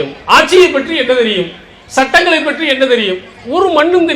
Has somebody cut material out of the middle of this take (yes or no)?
no